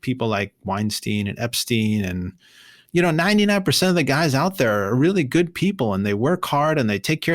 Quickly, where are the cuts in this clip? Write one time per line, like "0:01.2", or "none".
0:02.8